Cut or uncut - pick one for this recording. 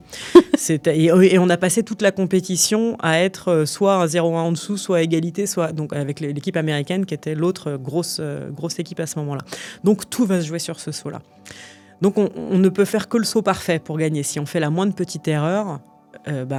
uncut